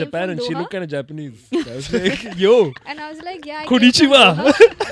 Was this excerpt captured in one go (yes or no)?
yes